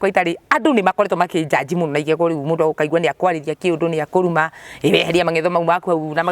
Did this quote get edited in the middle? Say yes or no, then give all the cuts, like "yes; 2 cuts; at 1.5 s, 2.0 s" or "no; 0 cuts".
no; 0 cuts